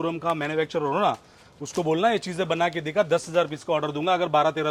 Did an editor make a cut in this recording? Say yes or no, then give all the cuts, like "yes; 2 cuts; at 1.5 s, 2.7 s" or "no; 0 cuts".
no; 0 cuts